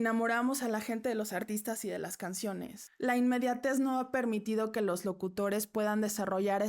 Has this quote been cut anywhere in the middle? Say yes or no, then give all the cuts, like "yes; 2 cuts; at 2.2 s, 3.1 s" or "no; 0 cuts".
yes; 1 cut; at 2.7 s